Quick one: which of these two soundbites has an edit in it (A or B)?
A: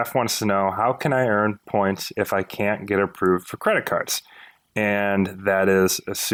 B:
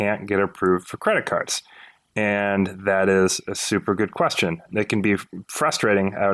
B